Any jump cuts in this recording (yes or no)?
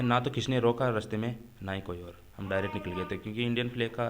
no